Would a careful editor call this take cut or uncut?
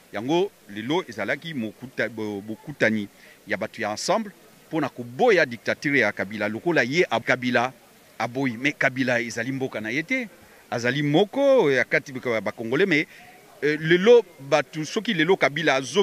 cut